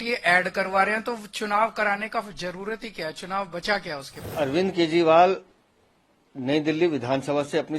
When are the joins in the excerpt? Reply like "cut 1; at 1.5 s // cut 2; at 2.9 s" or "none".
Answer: cut 1; at 4.2 s